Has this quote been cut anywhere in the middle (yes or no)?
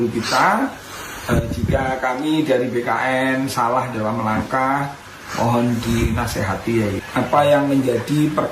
yes